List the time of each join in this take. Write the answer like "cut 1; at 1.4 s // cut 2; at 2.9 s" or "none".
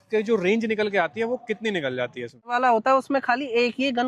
cut 1; at 2.5 s

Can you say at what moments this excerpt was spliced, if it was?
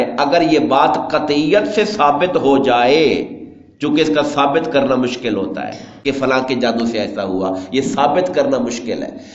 none

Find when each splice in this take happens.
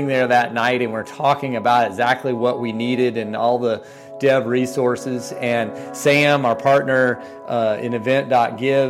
none

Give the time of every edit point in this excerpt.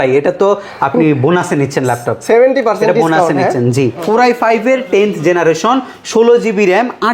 cut 1; at 4.0 s

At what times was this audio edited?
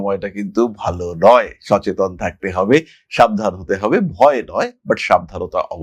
none

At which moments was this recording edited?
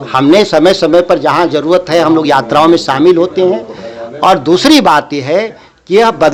none

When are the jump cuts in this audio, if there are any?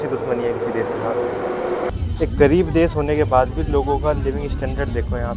cut 1; at 1.9 s

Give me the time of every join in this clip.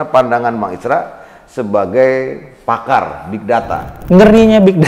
cut 1; at 4.0 s

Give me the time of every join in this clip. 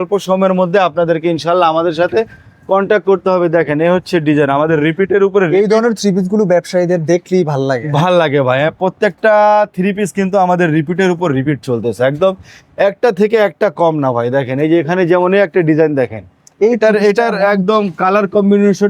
none

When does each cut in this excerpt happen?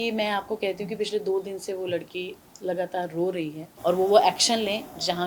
cut 1; at 3.6 s

